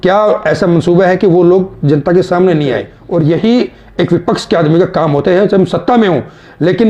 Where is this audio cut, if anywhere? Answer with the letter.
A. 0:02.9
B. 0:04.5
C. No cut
A